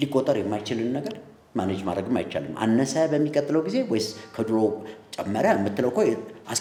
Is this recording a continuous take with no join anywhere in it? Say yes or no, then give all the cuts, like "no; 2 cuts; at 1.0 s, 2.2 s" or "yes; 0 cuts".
yes; 0 cuts